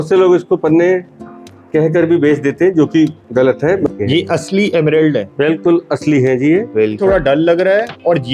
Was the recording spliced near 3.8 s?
yes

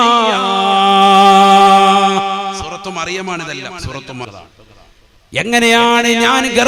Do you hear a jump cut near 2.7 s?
no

